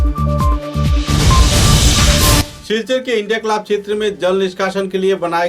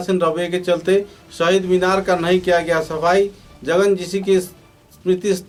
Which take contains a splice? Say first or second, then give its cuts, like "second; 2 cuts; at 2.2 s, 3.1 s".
first; 1 cut; at 2.5 s